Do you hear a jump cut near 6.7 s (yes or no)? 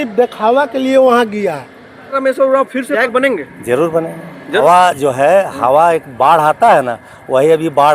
no